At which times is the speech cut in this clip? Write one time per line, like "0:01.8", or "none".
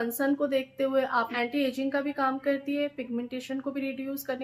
0:01.3